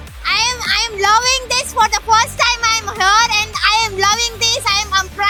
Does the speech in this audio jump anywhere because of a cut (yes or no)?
no